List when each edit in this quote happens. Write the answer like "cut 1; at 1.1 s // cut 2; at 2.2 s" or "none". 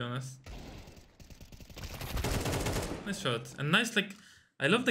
none